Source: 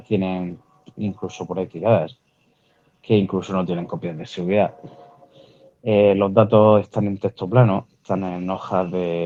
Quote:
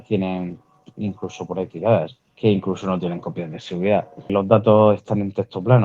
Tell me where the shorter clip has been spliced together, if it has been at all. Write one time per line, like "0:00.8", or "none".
0:02.2
0:04.3